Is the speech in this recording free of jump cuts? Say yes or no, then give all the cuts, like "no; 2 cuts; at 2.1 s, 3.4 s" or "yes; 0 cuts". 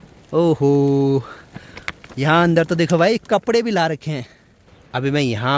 yes; 0 cuts